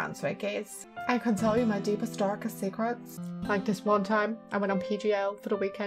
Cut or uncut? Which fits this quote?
uncut